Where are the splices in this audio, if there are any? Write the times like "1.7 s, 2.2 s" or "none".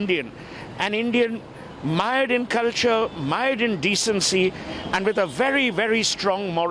none